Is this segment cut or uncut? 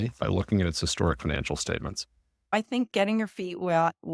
cut